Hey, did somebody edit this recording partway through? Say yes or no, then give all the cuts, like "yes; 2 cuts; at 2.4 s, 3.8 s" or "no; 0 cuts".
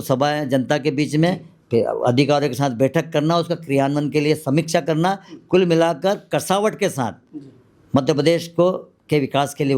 no; 0 cuts